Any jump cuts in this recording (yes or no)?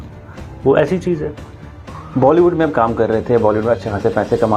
no